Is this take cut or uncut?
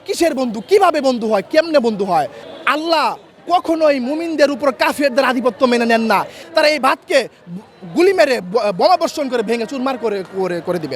cut